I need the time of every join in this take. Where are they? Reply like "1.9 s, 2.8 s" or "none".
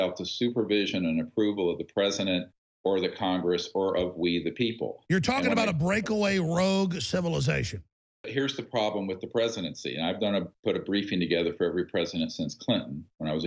8.3 s